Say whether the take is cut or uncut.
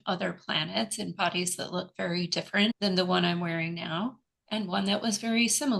cut